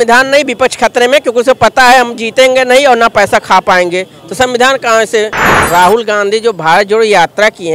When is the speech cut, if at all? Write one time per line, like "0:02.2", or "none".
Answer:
0:05.6